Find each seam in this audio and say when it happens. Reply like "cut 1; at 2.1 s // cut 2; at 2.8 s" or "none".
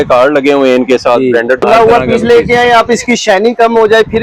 cut 1; at 1.6 s